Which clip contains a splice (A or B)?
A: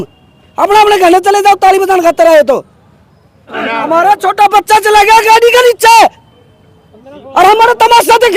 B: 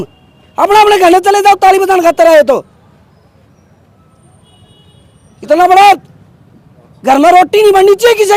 A